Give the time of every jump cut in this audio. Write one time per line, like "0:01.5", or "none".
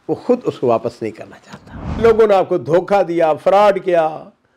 0:02.0